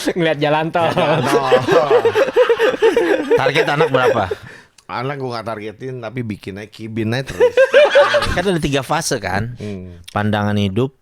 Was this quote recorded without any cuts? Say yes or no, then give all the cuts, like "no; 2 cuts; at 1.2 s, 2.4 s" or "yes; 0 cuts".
no; 1 cut; at 8.3 s